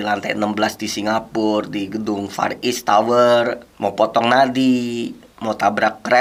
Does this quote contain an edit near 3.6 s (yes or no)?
no